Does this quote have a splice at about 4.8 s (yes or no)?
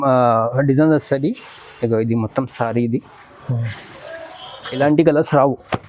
yes